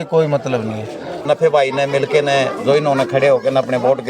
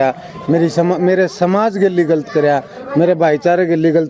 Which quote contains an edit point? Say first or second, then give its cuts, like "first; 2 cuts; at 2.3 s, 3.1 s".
first; 1 cut; at 1.2 s